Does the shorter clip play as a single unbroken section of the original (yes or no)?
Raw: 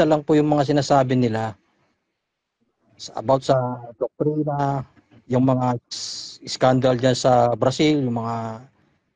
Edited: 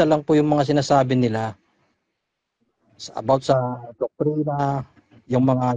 yes